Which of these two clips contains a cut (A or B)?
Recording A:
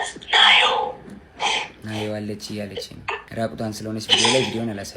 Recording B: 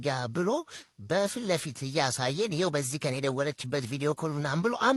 A